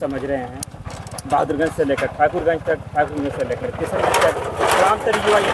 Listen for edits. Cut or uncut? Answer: uncut